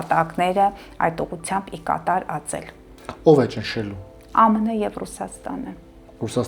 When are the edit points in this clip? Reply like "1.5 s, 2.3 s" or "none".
none